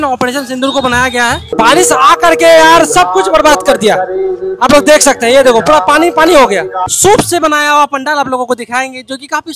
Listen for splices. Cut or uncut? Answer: cut